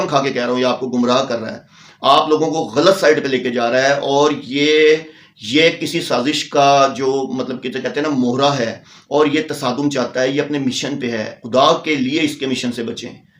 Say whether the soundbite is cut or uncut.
uncut